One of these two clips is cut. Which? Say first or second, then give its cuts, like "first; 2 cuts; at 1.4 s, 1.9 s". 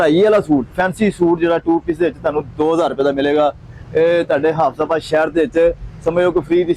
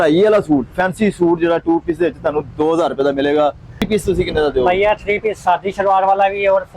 second; 1 cut; at 3.9 s